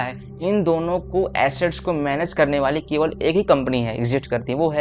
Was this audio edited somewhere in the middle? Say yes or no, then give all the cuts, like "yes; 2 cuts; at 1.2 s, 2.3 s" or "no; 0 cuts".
no; 0 cuts